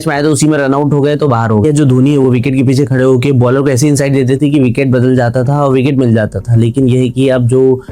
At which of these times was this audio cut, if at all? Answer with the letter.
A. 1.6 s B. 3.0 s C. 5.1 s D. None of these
A